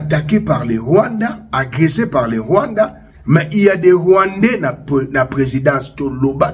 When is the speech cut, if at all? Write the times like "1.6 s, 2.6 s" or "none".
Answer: 3.1 s